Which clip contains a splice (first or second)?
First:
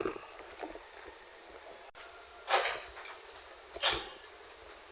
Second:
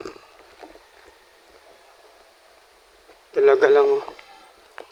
first